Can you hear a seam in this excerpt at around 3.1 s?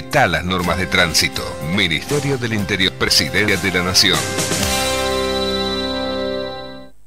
yes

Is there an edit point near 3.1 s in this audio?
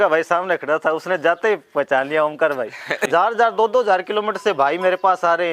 yes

